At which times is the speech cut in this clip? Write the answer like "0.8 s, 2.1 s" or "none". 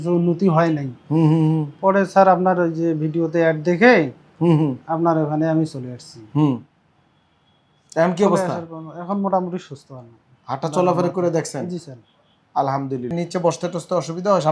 13.1 s